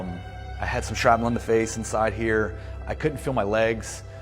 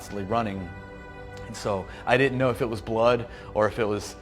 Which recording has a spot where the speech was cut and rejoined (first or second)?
first